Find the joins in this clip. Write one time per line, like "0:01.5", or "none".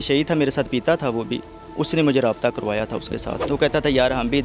0:03.3